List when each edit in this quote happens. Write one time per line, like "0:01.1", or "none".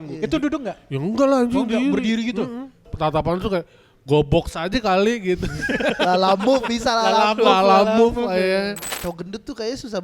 0:02.9
0:08.9